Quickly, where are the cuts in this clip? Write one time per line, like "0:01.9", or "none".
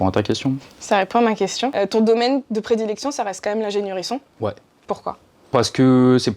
0:01.7
0:05.0